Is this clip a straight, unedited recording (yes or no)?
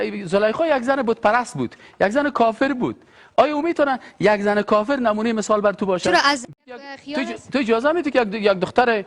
no